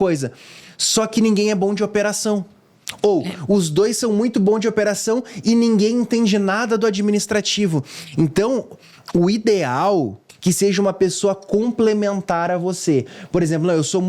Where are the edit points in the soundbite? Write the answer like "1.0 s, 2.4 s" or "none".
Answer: 10.2 s